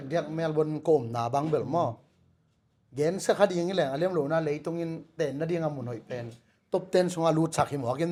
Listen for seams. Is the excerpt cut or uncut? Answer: uncut